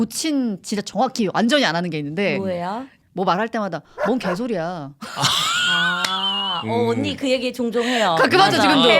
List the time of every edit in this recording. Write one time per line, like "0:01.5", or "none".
0:03.0